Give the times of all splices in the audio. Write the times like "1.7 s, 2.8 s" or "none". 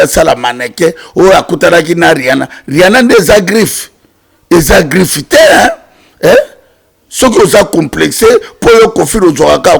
none